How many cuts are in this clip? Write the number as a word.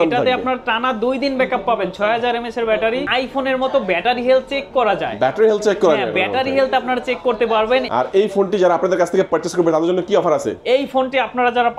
two